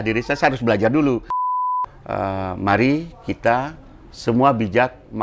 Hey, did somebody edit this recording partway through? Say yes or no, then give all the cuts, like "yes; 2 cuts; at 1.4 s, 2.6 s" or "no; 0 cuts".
yes; 1 cut; at 1.5 s